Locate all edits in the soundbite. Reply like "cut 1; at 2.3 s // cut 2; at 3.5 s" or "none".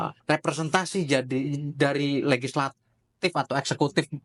none

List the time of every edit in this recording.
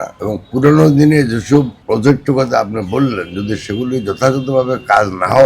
cut 1; at 1.8 s

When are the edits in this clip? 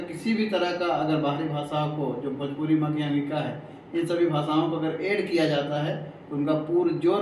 none

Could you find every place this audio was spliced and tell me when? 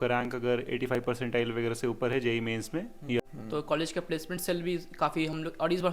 cut 1; at 3.2 s

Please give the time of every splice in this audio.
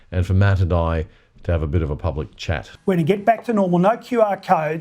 cut 1; at 2.7 s

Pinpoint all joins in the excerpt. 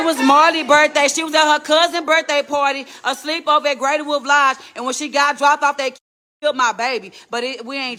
none

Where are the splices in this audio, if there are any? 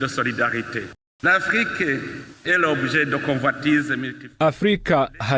cut 1; at 1.0 s

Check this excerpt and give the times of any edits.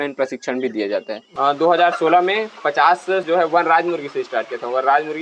cut 1; at 1.2 s // cut 2; at 3.2 s

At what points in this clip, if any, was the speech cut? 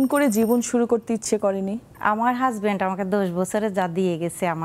cut 1; at 1.9 s

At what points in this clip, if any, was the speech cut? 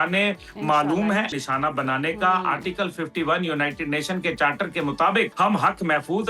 cut 1; at 1.4 s // cut 2; at 5.3 s

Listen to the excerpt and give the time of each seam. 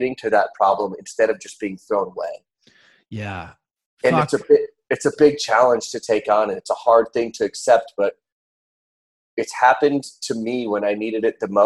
none

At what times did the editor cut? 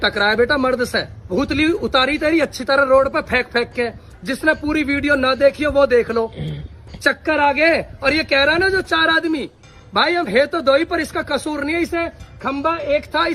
cut 1; at 1.3 s

